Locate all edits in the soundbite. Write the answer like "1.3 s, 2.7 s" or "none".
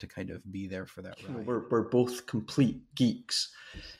1.4 s

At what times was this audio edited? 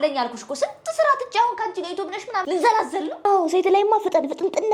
3.2 s

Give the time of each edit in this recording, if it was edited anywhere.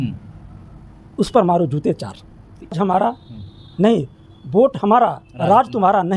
2.8 s

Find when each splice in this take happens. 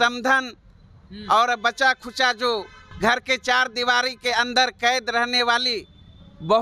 2.8 s

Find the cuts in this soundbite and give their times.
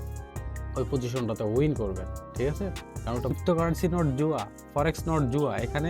3.3 s

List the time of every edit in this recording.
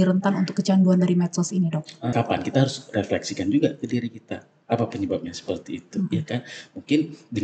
2.1 s

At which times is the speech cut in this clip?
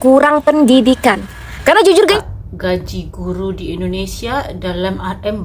2.1 s

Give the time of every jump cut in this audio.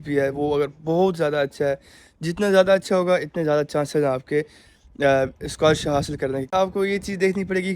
6.5 s

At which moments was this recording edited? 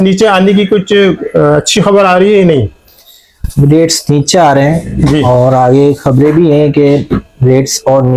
none

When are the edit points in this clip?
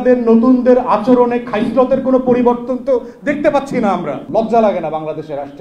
4.2 s

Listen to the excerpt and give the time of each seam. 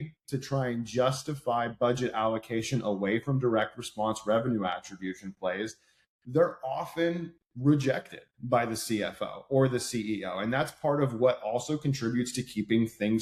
none

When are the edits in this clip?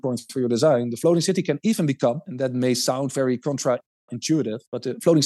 none

